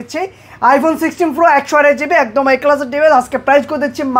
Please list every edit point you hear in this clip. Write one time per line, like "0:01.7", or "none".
none